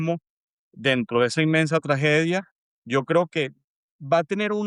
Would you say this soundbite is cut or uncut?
uncut